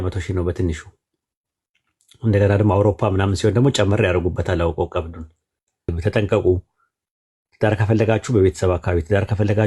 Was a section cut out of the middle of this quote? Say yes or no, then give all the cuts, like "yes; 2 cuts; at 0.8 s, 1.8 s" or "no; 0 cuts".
yes; 1 cut; at 5.9 s